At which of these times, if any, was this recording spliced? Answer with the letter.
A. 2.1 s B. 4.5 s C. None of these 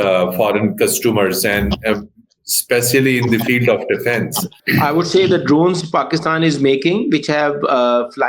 B